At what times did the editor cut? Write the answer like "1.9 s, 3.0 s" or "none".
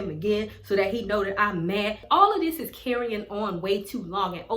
2.0 s